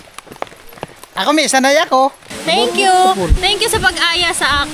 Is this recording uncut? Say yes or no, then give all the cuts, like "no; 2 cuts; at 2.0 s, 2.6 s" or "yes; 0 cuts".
no; 1 cut; at 2.3 s